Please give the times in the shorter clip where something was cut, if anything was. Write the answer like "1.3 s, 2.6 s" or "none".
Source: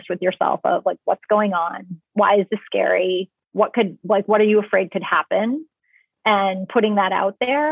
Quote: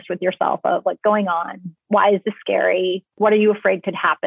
1.0 s, 3.2 s